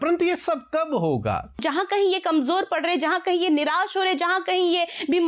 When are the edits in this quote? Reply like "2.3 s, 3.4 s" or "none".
1.6 s